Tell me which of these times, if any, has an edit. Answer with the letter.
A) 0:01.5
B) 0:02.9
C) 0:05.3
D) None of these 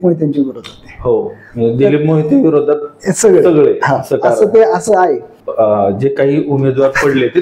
C